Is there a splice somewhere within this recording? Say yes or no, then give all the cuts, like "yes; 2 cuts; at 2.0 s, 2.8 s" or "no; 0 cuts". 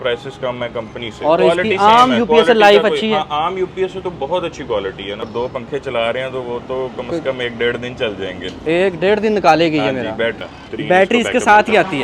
yes; 3 cuts; at 1.4 s, 5.3 s, 10.7 s